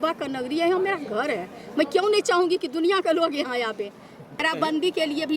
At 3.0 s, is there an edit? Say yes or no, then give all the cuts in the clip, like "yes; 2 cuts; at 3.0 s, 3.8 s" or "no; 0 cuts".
no; 1 cut; at 4.4 s